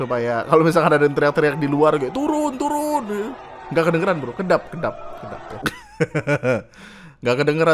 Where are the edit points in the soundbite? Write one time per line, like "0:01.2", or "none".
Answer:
0:05.5